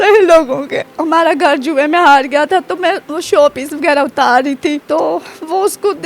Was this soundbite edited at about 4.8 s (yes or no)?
yes